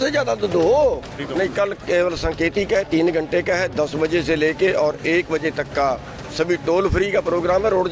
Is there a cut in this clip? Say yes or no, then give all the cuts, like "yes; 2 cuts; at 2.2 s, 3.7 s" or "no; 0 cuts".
yes; 1 cut; at 1.2 s